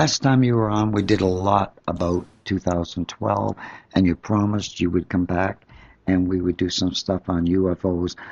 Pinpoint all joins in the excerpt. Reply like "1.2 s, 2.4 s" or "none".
3.9 s